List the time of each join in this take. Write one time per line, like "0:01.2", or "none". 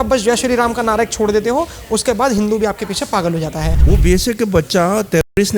0:03.8